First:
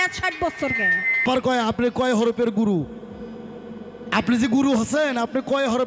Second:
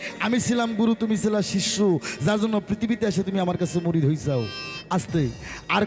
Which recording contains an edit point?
first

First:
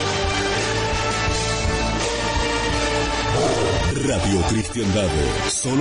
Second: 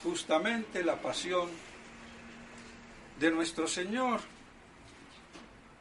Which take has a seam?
second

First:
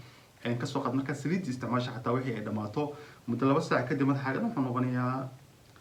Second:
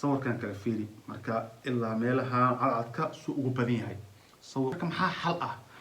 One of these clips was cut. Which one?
second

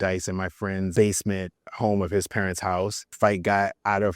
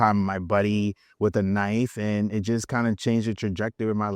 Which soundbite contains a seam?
first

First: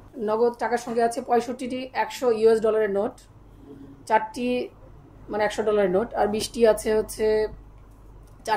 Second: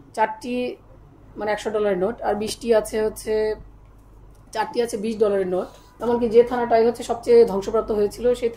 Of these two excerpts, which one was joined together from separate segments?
second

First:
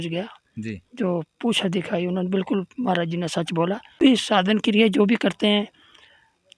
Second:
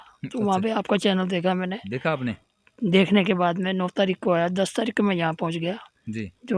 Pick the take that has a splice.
first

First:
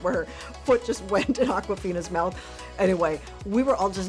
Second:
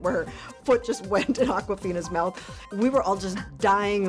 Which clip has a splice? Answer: second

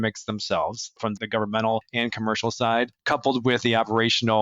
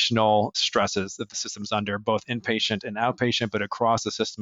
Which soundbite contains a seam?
first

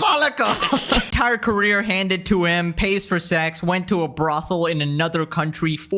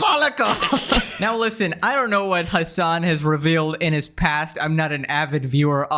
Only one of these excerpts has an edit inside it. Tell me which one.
first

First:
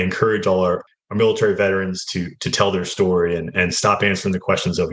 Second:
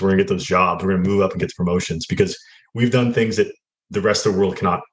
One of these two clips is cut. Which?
first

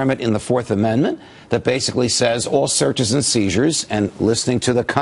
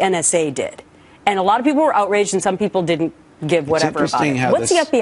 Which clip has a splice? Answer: second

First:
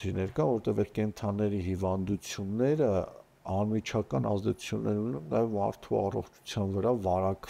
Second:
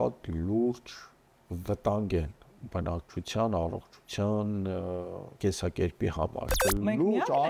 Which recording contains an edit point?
second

